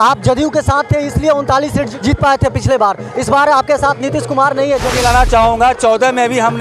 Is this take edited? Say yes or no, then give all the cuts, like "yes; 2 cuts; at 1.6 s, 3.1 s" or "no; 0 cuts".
yes; 2 cuts; at 1.9 s, 4.9 s